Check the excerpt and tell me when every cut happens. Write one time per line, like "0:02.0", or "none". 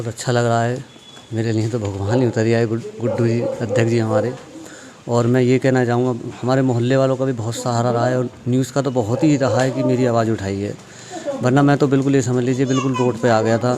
none